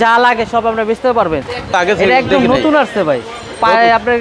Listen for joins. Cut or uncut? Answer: cut